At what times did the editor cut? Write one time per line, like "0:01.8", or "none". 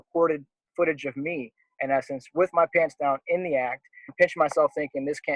0:04.1